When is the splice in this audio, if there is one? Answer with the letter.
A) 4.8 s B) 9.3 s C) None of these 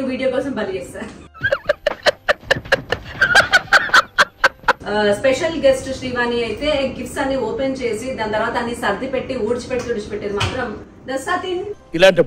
A